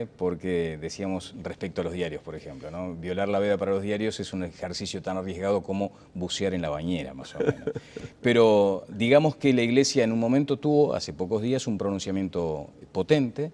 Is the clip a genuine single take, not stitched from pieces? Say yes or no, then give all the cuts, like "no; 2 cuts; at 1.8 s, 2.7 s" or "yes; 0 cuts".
yes; 0 cuts